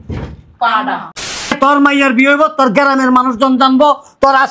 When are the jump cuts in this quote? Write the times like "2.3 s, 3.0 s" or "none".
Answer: 1.5 s